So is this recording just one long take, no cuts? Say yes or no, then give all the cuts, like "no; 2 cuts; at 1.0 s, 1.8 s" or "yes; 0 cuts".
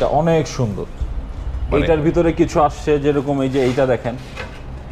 yes; 0 cuts